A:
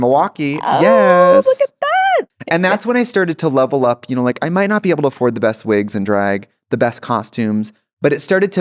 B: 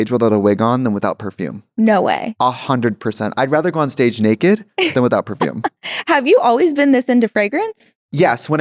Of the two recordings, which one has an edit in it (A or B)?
A